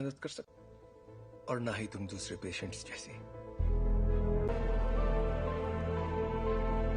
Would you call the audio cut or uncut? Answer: cut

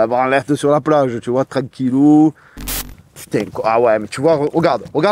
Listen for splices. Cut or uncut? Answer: cut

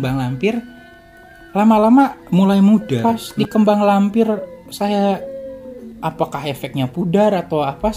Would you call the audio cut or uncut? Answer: cut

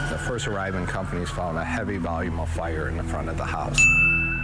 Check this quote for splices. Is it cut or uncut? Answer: uncut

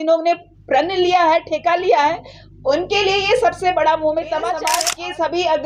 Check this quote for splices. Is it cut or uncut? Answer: cut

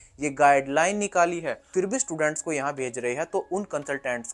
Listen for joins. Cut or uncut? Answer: cut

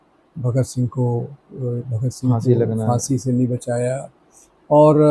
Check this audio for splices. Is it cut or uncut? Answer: uncut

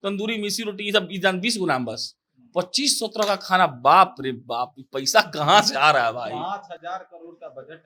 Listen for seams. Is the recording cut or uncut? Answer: uncut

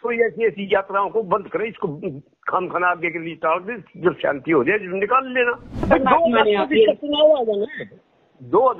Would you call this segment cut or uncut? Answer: cut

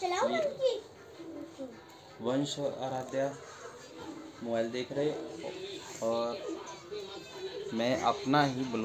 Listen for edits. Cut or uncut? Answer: uncut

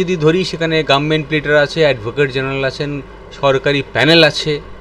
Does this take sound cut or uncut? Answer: uncut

